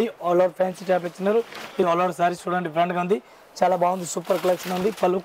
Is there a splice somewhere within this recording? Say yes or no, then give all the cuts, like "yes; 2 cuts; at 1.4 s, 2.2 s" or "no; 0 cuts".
yes; 1 cut; at 1.8 s